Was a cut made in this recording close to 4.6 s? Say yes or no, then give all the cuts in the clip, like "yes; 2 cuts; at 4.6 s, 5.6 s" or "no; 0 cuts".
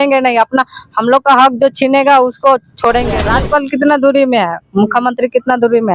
no; 1 cut; at 3.3 s